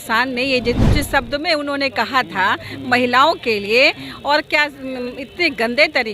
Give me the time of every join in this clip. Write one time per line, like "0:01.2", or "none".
none